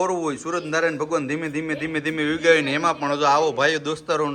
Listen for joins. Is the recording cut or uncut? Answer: uncut